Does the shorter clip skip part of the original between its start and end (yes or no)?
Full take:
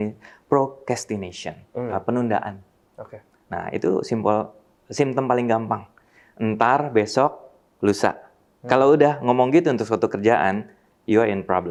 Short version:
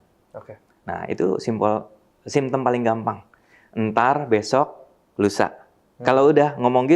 no